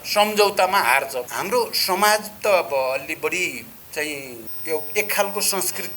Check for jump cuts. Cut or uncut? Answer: cut